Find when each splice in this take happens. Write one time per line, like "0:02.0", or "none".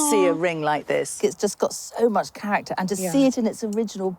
0:01.2